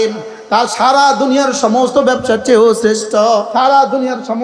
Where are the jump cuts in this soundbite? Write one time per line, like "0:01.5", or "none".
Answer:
0:03.5